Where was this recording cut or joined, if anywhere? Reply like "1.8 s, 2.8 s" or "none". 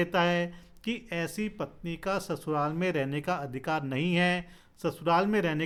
none